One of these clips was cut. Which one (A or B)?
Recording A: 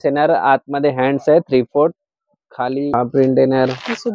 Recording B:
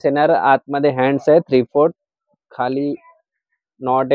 A